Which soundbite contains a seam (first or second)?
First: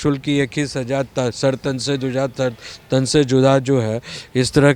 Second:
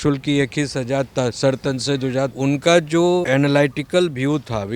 second